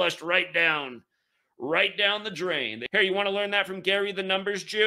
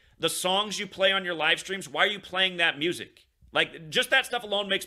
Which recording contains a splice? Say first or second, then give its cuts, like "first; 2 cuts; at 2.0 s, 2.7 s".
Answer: first; 1 cut; at 2.8 s